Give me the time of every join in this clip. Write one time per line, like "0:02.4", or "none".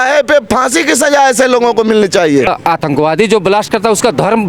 0:02.5